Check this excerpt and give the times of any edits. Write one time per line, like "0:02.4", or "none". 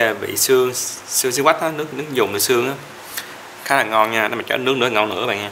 none